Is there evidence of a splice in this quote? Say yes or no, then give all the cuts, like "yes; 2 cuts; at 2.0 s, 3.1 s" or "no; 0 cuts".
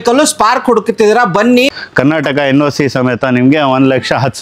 yes; 1 cut; at 1.7 s